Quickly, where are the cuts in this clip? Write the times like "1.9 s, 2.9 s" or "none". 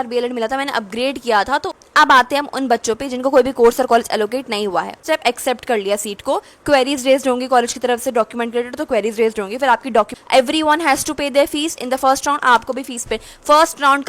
1.8 s, 5.0 s, 10.1 s